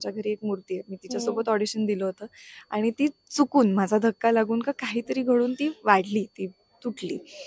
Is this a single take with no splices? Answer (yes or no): yes